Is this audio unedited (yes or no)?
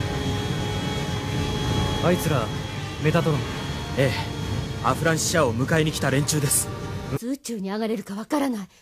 yes